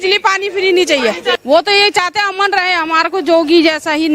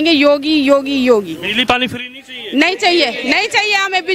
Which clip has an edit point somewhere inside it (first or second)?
first